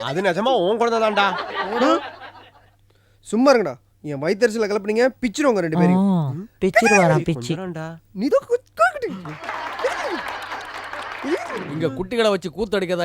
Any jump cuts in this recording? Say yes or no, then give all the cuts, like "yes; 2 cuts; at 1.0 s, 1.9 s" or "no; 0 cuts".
yes; 1 cut; at 11.7 s